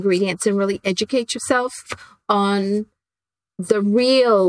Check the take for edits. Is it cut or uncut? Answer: uncut